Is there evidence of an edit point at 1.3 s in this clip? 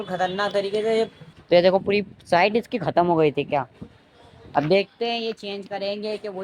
yes; 1 cut; at 1.3 s

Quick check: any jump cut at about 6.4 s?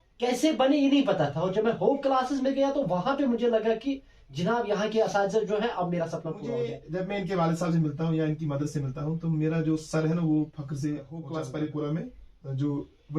yes; 2 cuts; at 6.4 s, 11.2 s

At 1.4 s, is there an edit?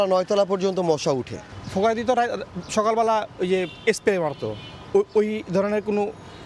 no; 0 cuts

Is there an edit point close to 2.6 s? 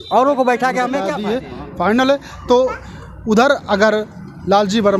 no; 1 cut; at 1.1 s

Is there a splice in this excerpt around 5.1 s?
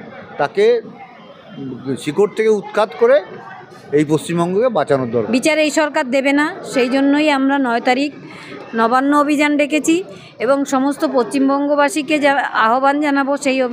yes; 1 cut; at 5.1 s

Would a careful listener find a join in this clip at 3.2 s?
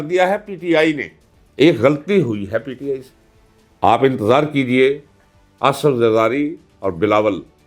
yes; 1 cut; at 3.2 s

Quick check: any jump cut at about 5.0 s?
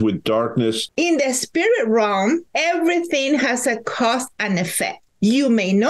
yes; 3 cuts; at 0.8 s, 2.5 s, 5.0 s

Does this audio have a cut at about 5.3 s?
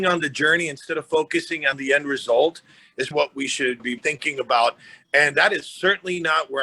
no; 2 cuts; at 1.8 s, 3.1 s

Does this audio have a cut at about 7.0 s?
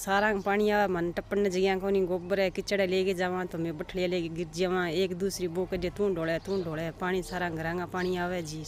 no; 0 cuts

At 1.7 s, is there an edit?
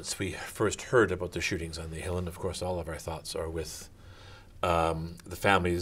yes; 1 cut; at 1.7 s

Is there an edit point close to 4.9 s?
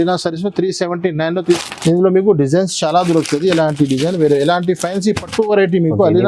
no; 1 cut; at 1.6 s

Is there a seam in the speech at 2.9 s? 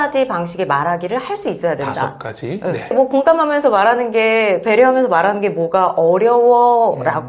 yes; 1 cut; at 2.9 s

